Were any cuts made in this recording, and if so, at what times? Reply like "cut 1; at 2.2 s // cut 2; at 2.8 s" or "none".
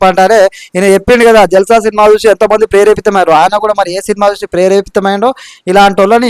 none